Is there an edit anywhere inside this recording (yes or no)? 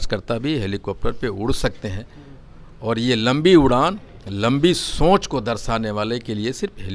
no